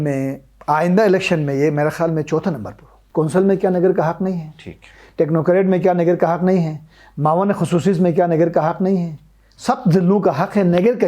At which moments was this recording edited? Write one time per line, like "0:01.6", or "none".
0:03.0